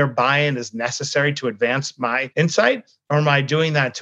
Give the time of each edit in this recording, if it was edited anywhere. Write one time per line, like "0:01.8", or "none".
0:02.2